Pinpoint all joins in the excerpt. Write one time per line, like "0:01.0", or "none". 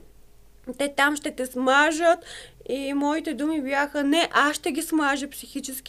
none